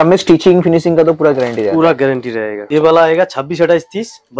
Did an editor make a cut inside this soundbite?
yes; 1 cut; at 2.6 s

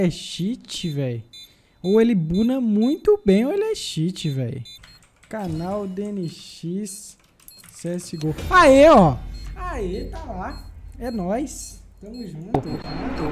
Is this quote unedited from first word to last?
no; 1 cut; at 4.7 s

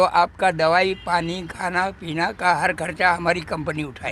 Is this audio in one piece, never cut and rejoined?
yes; 0 cuts

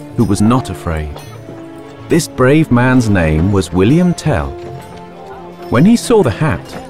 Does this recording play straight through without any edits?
yes; 0 cuts

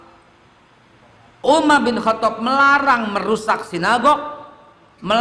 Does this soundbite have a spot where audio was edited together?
yes; 1 cut; at 1.4 s

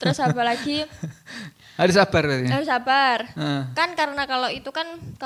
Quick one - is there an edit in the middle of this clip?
no; 0 cuts

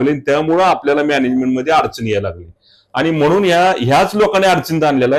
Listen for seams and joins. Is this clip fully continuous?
yes; 0 cuts

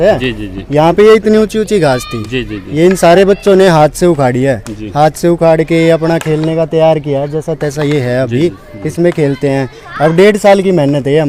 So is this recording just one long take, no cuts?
yes; 0 cuts

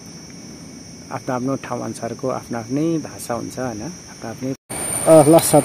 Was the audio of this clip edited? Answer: yes; 1 cut; at 4.6 s

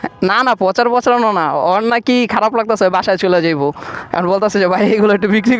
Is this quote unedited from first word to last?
yes; 0 cuts

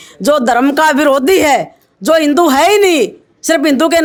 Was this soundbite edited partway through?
no; 0 cuts

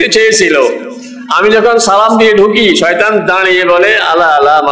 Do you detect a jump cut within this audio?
no; 0 cuts

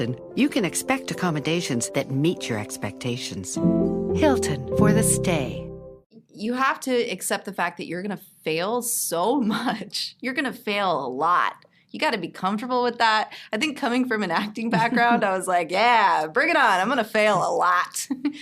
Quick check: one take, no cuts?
no; 1 cut; at 6.1 s

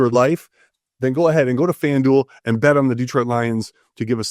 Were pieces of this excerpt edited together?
no; 0 cuts

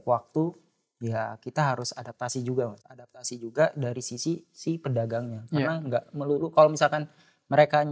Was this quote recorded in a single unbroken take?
no; 1 cut; at 3.2 s

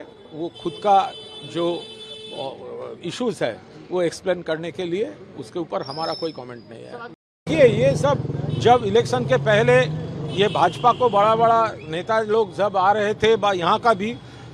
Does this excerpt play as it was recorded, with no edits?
no; 1 cut; at 7.3 s

